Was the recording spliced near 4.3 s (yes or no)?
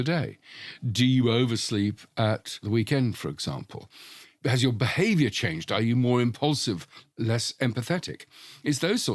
yes